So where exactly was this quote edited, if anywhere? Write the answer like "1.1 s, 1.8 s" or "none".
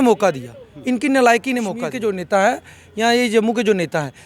1.9 s